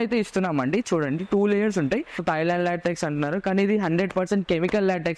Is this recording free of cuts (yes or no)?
no